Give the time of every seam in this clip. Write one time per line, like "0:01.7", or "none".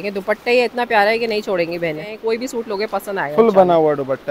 0:02.1